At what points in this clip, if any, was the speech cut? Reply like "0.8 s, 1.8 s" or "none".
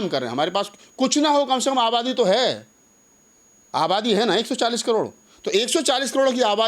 none

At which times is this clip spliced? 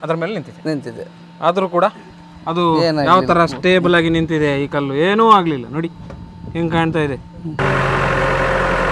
7.6 s

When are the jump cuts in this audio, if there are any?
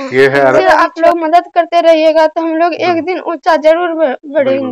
none

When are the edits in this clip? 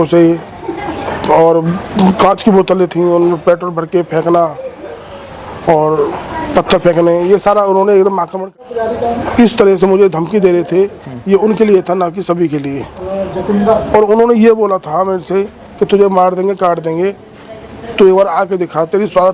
8.4 s

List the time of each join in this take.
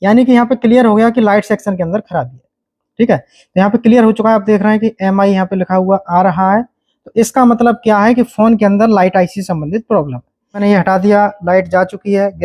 10.6 s

